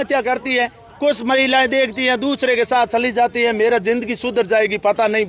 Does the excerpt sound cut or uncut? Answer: uncut